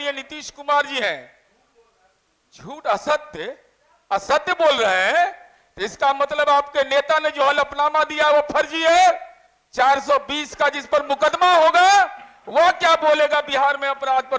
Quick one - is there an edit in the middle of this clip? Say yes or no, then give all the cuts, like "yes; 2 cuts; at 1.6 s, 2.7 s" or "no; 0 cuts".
no; 0 cuts